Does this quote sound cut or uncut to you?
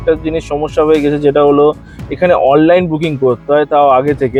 uncut